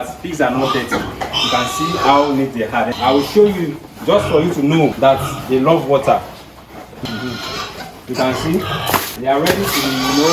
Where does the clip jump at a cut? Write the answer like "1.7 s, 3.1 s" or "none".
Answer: 2.9 s, 4.9 s, 9.1 s